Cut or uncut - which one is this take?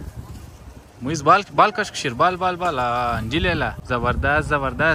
cut